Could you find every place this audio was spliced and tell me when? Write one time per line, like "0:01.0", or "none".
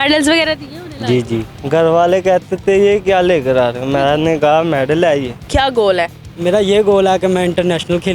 0:01.5
0:05.5